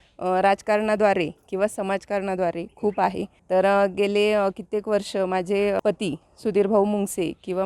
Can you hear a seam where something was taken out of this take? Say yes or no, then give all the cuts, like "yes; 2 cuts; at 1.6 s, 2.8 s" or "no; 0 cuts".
yes; 2 cuts; at 3.3 s, 5.8 s